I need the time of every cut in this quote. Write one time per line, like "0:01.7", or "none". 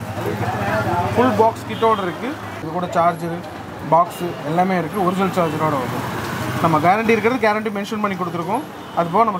0:02.5

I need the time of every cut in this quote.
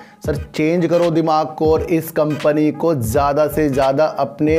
none

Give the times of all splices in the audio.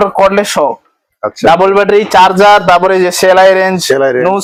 none

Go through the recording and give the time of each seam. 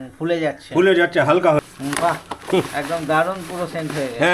0:01.7

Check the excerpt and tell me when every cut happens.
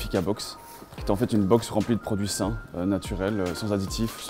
none

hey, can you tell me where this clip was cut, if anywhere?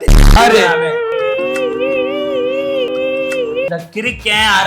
0:03.8

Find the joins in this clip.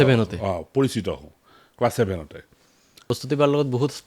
0:02.9

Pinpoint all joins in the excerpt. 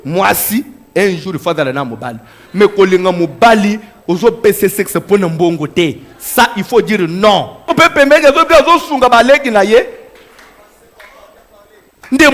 0:07.7

